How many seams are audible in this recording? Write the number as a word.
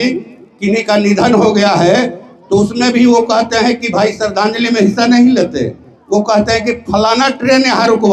zero